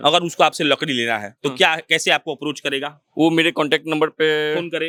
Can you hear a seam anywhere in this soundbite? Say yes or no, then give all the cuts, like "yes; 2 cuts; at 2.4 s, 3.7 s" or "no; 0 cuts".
no; 0 cuts